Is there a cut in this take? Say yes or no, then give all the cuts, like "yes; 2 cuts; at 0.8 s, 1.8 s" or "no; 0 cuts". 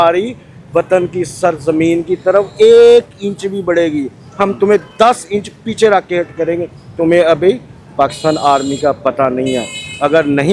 no; 0 cuts